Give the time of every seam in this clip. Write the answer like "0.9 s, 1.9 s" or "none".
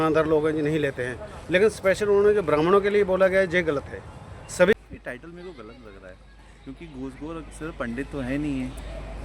4.7 s